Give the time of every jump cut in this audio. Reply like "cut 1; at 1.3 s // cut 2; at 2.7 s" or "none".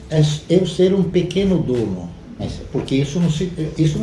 cut 1; at 2.6 s